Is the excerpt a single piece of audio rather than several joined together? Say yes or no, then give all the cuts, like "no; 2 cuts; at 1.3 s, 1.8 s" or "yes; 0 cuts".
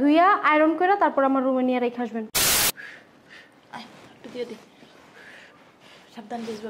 no; 1 cut; at 2.4 s